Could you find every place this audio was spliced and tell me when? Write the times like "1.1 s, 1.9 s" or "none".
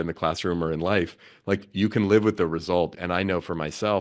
2.9 s